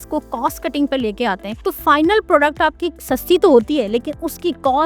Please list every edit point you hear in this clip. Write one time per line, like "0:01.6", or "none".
0:01.5
0:02.9

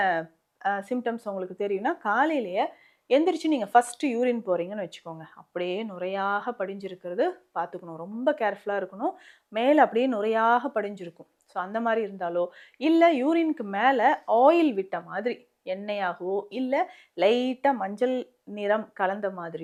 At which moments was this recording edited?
none

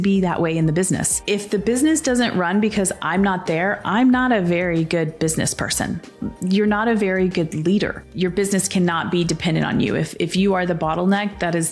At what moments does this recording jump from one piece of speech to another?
0:01.2
0:08.0

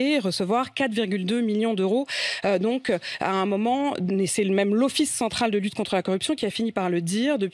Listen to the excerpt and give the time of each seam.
none

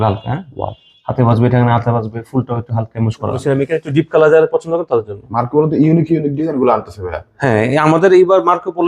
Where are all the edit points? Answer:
0:03.4

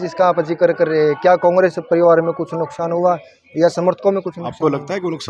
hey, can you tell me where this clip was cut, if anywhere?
none

